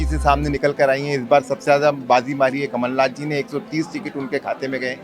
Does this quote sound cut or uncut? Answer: uncut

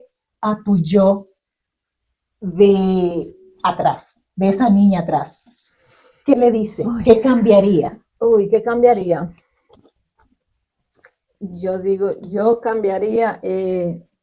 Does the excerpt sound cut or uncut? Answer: uncut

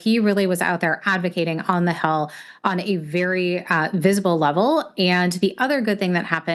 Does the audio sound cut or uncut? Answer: uncut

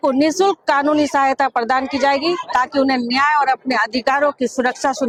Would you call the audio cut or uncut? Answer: uncut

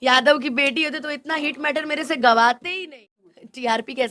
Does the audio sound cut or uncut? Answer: cut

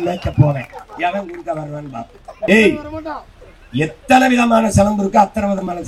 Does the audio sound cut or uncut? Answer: cut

